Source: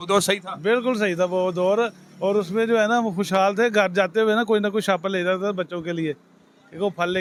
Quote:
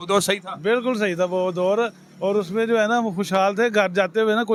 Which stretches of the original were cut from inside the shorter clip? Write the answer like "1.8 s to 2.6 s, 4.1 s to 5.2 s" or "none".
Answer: none